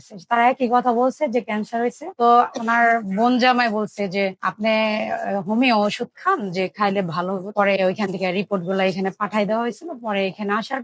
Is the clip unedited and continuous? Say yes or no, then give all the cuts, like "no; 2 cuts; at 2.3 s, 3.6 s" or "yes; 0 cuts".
no; 2 cuts; at 2.0 s, 7.5 s